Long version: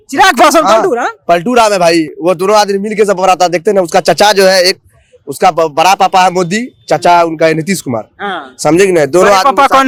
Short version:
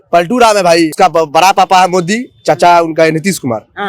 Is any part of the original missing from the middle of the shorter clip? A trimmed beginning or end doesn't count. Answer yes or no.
yes